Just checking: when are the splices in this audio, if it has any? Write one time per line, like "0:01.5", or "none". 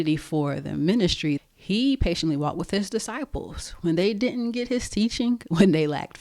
0:01.4